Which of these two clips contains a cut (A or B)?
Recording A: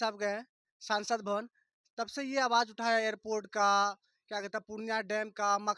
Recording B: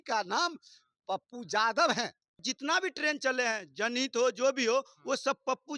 B